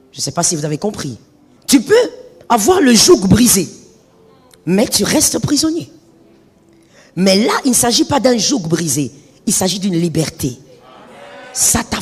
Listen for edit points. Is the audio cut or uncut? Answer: cut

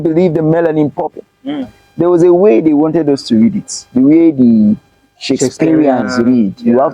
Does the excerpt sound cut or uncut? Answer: cut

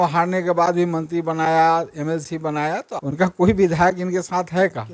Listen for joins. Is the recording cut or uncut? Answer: cut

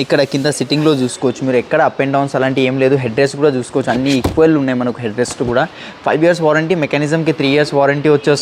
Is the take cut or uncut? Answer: uncut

